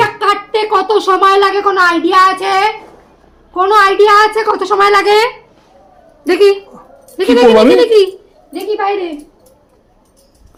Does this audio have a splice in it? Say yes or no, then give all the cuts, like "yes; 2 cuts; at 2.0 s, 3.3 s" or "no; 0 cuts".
no; 0 cuts